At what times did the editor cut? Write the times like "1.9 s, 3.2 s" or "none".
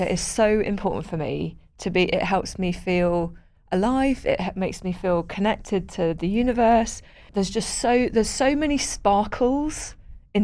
7.2 s